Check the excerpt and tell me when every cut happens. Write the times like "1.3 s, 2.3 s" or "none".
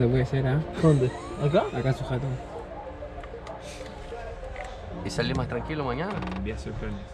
none